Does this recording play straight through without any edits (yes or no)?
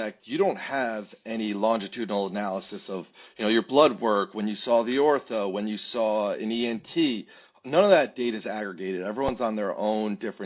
yes